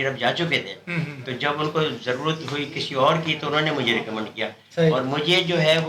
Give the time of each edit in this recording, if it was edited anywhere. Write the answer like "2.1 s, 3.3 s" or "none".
none